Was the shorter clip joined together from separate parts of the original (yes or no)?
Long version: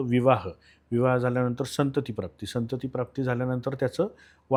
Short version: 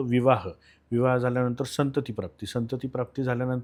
no